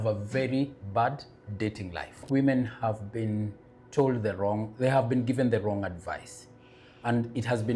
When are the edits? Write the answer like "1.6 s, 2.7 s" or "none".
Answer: 2.2 s